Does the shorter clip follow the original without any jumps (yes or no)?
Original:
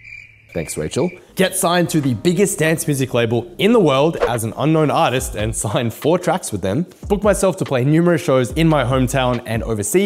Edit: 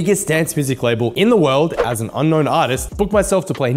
no